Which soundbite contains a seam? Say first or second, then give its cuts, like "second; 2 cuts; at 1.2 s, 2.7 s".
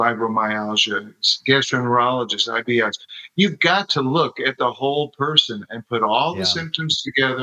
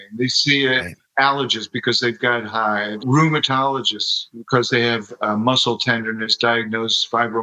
second; 2 cuts; at 1.0 s, 3.0 s